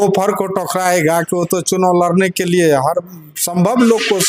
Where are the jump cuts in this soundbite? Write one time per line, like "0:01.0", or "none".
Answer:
none